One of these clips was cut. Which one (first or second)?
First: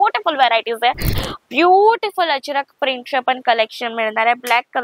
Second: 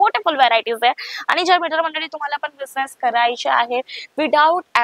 first